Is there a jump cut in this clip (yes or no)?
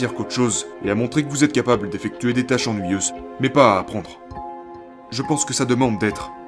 yes